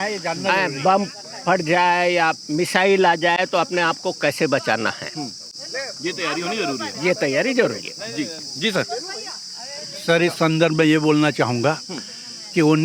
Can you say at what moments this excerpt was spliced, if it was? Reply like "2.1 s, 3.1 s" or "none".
none